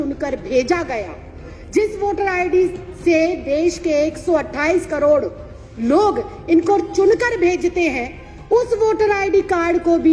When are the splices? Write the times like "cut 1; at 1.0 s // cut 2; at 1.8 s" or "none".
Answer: none